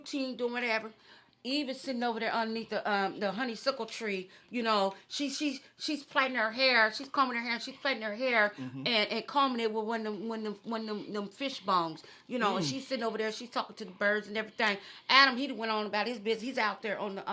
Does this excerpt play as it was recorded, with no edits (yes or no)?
yes